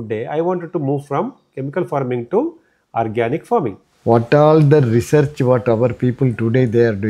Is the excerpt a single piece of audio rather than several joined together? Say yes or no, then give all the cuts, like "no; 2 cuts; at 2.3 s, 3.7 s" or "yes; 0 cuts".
no; 1 cut; at 3.9 s